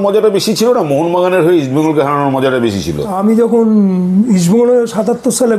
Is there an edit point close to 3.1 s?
yes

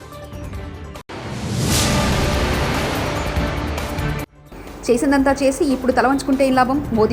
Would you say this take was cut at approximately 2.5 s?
no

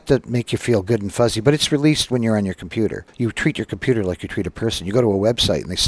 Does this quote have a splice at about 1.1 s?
no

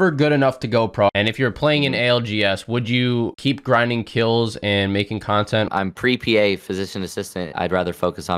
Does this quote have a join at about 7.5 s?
yes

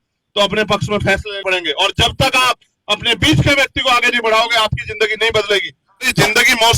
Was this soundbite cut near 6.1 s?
yes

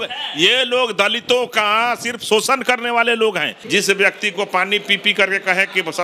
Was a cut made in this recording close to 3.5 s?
yes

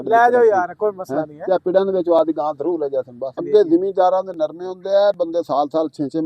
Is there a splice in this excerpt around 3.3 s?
yes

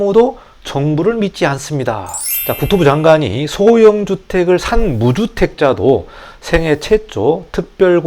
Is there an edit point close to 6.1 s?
no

